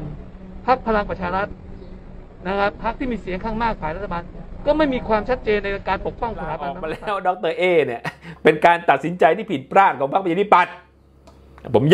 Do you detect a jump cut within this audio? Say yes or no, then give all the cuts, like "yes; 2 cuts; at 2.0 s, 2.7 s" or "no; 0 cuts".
yes; 1 cut; at 6.9 s